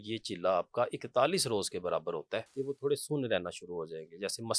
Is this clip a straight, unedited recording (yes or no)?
no